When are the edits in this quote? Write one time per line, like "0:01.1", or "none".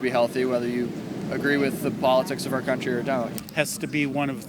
0:03.3